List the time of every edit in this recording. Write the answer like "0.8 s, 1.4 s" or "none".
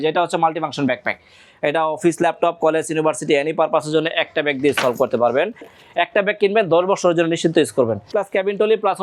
5.7 s, 8.1 s